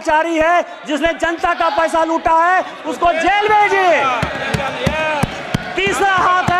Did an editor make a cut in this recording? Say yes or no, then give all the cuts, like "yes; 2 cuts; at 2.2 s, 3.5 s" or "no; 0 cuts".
no; 0 cuts